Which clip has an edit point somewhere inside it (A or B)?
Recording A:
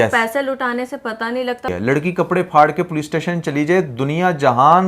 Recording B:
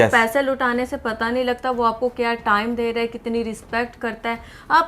A